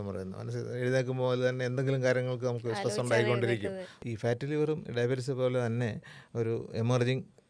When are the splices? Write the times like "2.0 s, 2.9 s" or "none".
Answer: 3.9 s